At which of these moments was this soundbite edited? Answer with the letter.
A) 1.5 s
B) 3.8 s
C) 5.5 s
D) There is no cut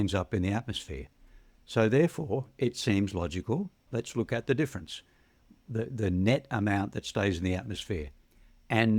B